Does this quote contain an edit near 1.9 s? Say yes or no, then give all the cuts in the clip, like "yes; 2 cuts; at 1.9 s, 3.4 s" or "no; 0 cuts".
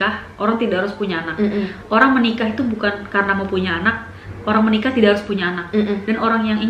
no; 0 cuts